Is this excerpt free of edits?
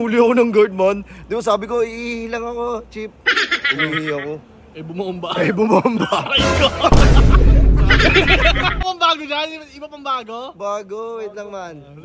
no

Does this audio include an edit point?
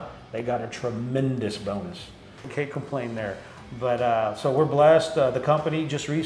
yes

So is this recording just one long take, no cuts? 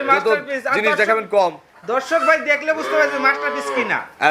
yes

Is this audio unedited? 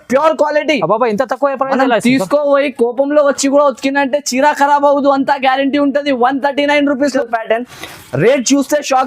no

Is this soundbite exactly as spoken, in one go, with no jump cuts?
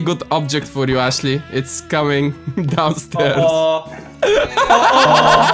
yes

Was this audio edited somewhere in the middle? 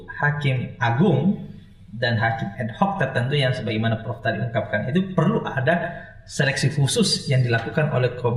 no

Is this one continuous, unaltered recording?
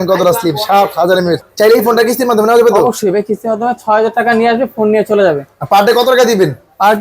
no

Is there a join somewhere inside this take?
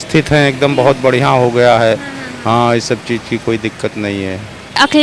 no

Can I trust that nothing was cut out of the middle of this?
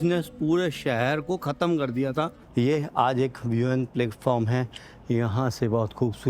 no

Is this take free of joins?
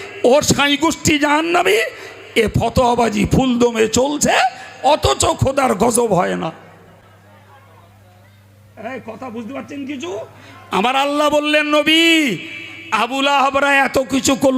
yes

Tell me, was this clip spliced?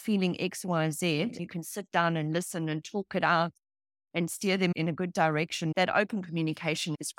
yes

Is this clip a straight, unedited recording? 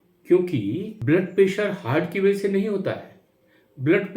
no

